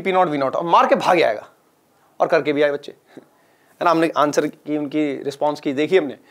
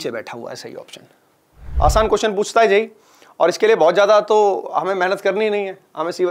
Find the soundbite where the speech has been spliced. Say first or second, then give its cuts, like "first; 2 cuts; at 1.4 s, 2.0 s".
second; 1 cut; at 1.7 s